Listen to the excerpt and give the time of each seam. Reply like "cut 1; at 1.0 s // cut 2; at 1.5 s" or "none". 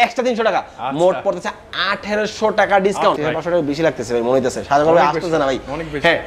cut 1; at 3.2 s